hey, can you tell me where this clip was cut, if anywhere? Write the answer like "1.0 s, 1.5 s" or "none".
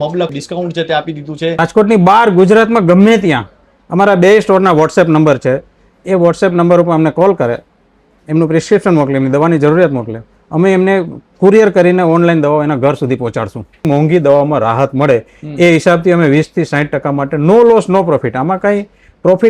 1.6 s, 13.9 s